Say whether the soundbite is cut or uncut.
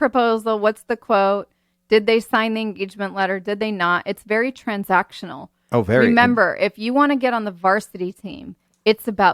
uncut